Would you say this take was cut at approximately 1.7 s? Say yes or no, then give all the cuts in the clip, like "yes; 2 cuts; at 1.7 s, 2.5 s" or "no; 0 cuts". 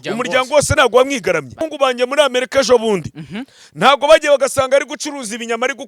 yes; 1 cut; at 1.7 s